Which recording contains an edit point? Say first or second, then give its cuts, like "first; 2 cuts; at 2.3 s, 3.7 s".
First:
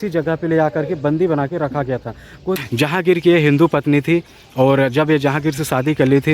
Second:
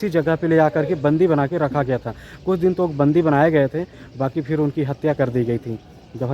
first; 1 cut; at 2.6 s